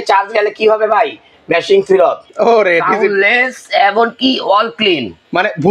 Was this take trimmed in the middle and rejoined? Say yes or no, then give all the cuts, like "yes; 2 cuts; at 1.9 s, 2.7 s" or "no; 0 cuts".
yes; 1 cut; at 2.3 s